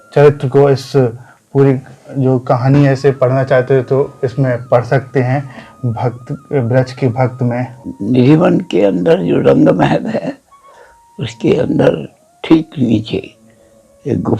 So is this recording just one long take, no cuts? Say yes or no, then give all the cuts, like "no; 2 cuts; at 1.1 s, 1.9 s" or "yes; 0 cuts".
no; 1 cut; at 7.8 s